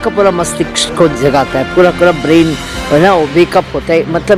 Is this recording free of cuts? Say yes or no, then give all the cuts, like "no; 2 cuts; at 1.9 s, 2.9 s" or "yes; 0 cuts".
yes; 0 cuts